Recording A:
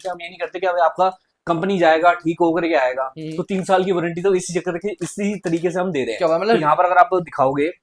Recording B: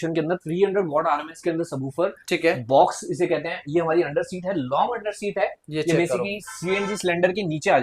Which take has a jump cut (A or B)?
A